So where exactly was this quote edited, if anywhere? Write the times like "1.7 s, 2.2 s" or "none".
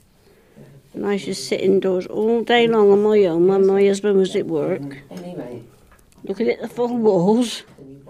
none